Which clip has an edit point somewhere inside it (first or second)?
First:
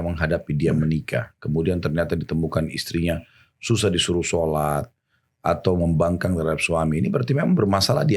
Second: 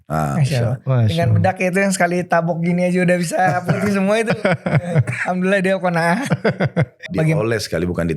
second